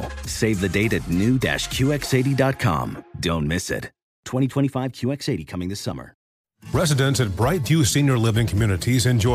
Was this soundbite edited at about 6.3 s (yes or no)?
yes